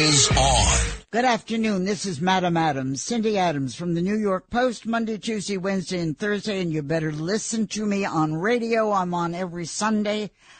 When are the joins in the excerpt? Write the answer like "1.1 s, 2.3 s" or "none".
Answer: 0.9 s